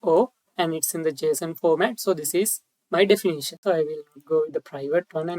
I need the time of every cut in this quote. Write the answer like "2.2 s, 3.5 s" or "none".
3.5 s